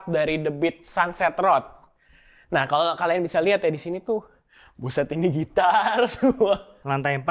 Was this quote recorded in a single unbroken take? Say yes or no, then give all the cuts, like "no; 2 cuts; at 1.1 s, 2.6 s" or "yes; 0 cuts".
yes; 0 cuts